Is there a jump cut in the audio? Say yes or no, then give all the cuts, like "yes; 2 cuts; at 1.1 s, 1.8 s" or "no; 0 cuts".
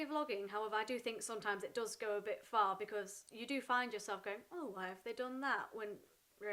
no; 0 cuts